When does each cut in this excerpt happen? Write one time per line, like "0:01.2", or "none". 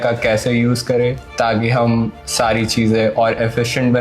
0:01.2